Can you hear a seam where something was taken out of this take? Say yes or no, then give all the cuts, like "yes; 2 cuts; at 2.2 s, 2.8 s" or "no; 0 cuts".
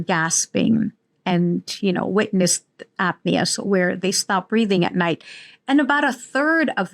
no; 0 cuts